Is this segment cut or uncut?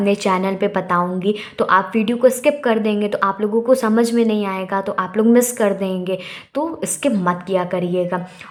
uncut